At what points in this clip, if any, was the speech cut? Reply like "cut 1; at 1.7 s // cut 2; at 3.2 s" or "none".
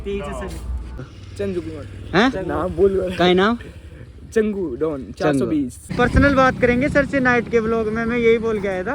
cut 1; at 1.2 s // cut 2; at 5.9 s